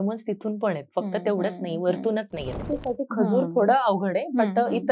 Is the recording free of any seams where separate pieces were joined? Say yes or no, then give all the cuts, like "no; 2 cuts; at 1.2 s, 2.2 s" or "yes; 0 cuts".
no; 1 cut; at 2.7 s